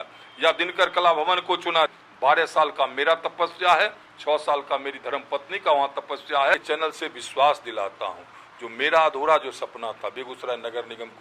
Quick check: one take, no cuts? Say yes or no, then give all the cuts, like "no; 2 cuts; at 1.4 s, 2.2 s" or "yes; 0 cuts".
no; 2 cuts; at 1.9 s, 6.6 s